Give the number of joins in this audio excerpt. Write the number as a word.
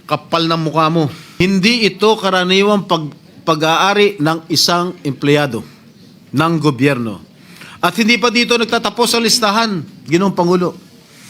one